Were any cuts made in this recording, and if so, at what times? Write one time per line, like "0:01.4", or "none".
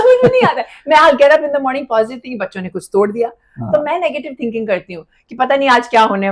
none